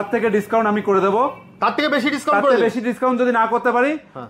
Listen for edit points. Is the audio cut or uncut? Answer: uncut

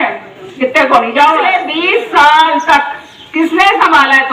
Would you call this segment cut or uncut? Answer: cut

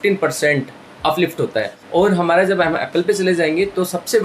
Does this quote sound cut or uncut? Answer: cut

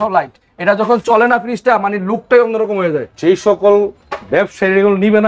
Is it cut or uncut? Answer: uncut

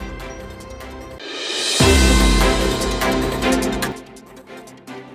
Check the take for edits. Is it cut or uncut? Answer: cut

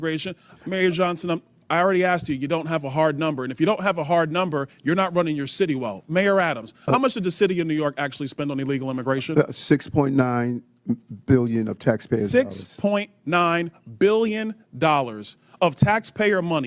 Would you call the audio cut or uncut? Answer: uncut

